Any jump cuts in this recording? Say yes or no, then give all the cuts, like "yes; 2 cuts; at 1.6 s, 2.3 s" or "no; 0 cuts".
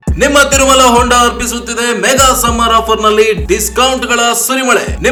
no; 0 cuts